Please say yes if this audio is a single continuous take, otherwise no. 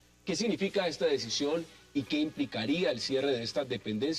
no